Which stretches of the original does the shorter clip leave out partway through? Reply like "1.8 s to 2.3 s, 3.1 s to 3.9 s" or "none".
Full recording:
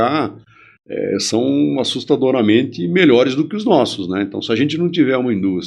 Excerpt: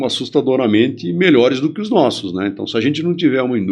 none